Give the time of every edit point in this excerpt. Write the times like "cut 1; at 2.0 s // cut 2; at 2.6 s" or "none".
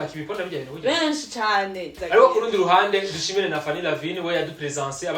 cut 1; at 2.0 s